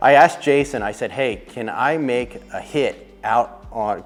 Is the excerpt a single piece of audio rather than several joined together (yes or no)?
yes